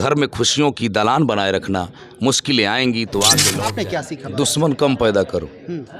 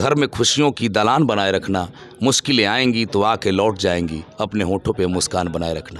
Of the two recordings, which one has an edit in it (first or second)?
first